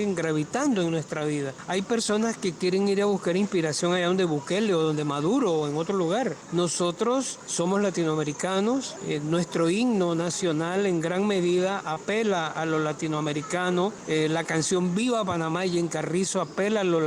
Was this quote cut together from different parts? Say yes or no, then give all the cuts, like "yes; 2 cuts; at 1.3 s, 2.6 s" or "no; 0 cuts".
yes; 5 cuts; at 1.6 s, 6.4 s, 7.4 s, 8.9 s, 14.0 s